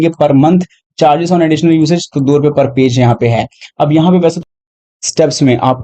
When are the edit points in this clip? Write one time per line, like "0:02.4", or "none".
0:04.4